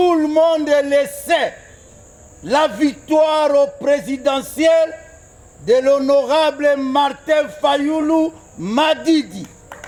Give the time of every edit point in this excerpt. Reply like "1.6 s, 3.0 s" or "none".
none